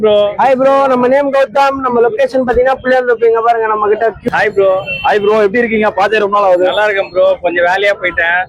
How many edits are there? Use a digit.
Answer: 1